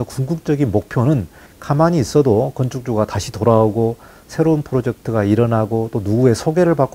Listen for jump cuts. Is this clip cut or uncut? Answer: uncut